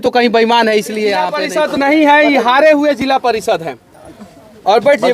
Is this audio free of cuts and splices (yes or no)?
no